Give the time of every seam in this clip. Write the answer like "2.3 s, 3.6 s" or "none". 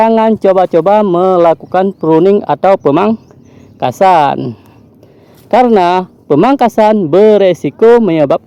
none